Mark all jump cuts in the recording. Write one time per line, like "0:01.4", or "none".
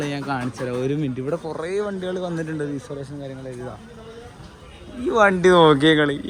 none